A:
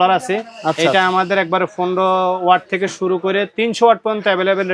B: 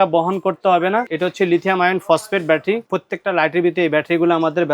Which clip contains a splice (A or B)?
B